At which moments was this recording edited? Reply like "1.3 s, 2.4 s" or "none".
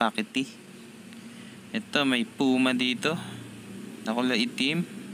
none